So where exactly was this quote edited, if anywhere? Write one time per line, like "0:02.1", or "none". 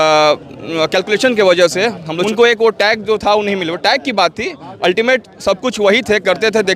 0:02.1